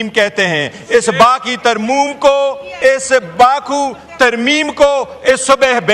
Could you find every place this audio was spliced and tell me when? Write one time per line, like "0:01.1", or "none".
0:02.7